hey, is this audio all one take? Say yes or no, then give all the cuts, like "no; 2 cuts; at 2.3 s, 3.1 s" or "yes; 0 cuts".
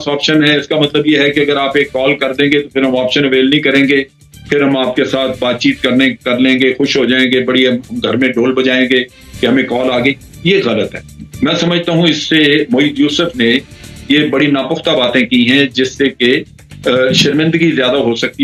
yes; 0 cuts